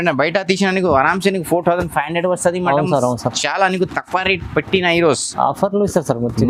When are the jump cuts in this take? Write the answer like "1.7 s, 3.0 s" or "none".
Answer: none